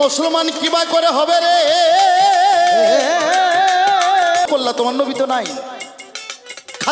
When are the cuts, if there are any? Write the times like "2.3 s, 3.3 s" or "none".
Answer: 4.5 s